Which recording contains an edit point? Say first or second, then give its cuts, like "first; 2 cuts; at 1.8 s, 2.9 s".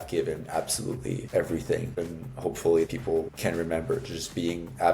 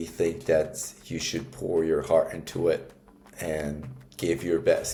first; 3 cuts; at 1.2 s, 1.9 s, 2.9 s